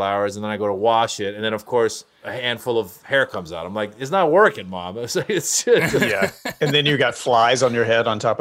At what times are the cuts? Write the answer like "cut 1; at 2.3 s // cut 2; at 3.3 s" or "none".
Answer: cut 1; at 6.5 s